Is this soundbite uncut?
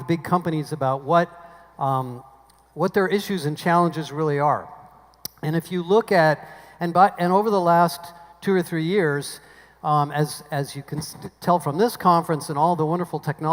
no; 1 cut; at 10.4 s

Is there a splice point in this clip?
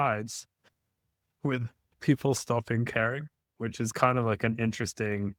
no; 0 cuts

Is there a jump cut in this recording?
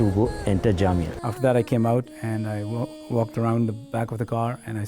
yes; 1 cut; at 1.2 s

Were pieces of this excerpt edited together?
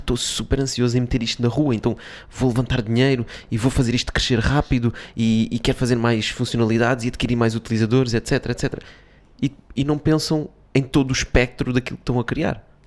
no; 0 cuts

